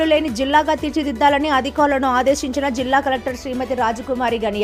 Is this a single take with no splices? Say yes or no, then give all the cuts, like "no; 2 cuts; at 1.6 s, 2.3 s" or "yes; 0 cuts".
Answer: yes; 0 cuts